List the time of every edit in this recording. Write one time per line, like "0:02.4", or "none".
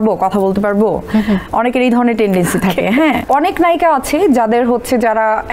0:03.2